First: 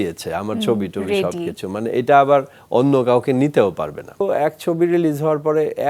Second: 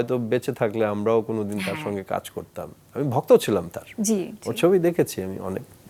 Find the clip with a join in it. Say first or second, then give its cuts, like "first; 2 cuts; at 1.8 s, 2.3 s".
first; 1 cut; at 4.2 s